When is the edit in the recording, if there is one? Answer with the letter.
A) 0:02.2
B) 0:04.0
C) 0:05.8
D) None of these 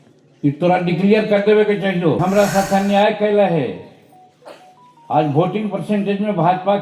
A